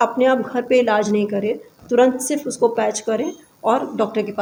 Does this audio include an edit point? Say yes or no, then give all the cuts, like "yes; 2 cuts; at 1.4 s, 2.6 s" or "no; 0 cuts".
no; 0 cuts